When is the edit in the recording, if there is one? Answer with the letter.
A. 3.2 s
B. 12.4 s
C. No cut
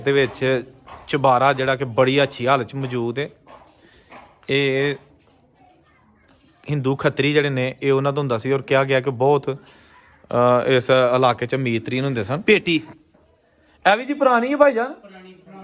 B